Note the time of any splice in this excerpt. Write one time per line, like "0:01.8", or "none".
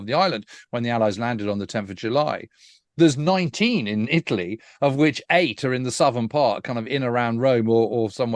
none

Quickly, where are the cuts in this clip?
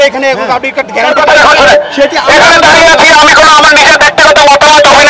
0:01.1

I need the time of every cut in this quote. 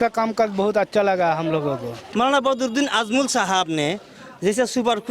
0:02.0

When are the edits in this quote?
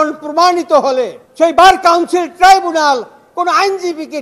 0:01.2

